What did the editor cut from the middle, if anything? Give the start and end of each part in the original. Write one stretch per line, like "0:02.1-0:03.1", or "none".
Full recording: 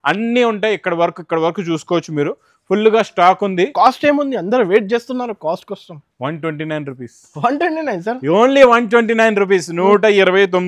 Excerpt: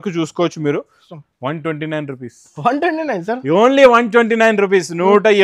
0:02.5-0:05.8